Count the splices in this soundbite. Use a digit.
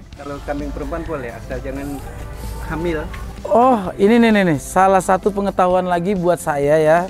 0